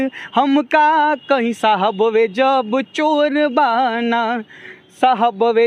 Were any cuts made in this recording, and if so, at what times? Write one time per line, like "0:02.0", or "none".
none